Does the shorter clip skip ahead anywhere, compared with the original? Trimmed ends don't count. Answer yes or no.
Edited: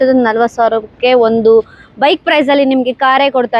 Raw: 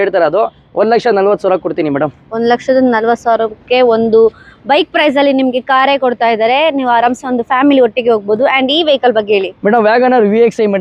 no